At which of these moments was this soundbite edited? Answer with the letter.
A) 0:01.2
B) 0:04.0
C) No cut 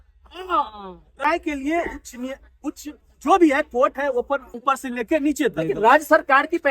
A